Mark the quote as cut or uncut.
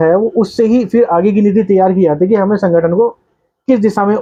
uncut